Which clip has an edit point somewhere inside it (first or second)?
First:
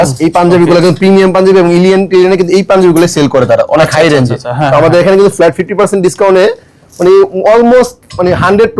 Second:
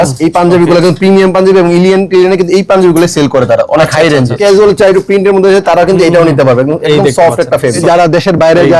second